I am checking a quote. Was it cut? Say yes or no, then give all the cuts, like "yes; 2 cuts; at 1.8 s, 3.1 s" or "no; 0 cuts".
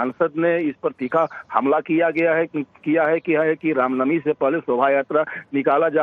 yes; 1 cut; at 2.7 s